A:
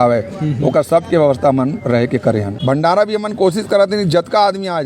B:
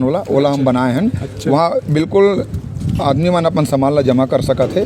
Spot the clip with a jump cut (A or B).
A